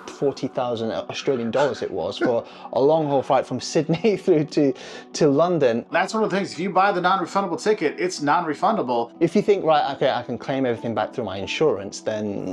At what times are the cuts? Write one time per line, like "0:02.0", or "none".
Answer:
0:05.9
0:09.1